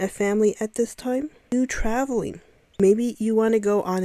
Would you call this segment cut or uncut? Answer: cut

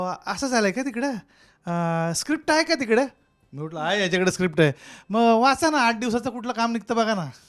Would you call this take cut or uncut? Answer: uncut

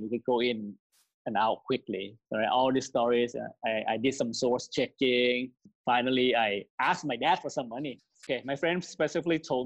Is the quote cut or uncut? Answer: cut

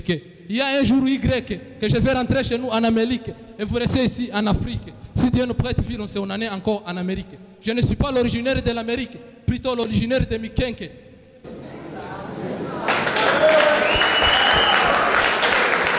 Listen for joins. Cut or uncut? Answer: uncut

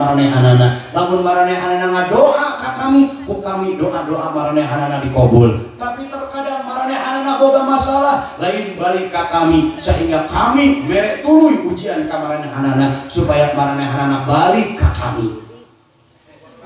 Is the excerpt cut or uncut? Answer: uncut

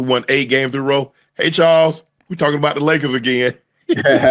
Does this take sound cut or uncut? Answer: uncut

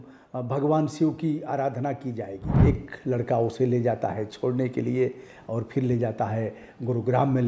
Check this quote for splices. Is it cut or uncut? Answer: cut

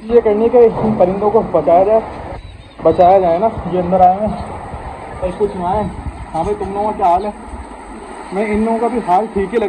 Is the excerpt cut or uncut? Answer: uncut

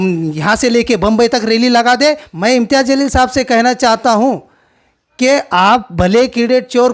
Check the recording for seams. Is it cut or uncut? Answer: cut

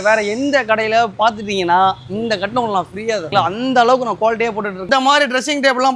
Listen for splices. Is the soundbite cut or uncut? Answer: cut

